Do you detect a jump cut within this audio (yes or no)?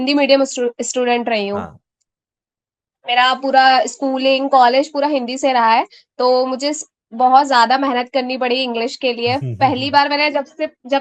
no